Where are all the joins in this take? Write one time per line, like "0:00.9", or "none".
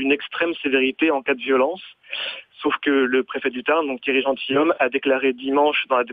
none